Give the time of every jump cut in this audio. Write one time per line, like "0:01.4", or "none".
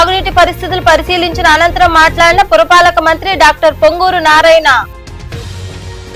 none

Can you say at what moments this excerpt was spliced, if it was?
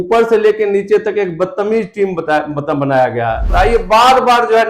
0:03.4

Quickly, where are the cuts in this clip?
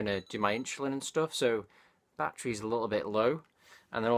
none

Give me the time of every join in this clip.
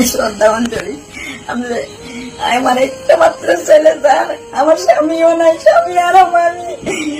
none

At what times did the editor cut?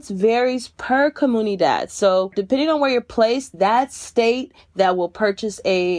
0:02.4

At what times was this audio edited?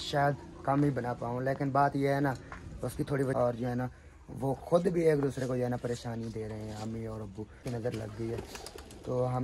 0:03.4
0:07.6

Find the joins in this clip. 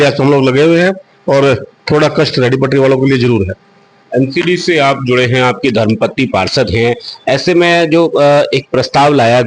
none

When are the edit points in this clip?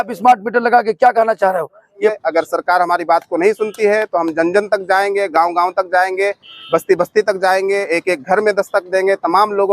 0:02.1

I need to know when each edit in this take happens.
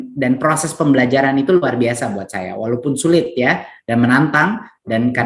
none

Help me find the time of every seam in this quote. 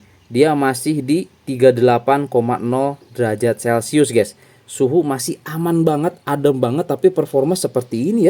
none

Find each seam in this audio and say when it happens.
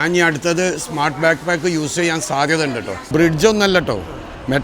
0:03.0

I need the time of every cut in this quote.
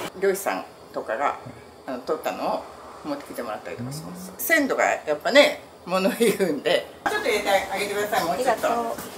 0:04.4
0:06.9

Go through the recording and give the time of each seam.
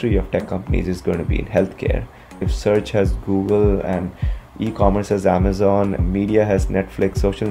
none

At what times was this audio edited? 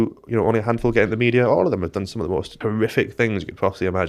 0:02.6

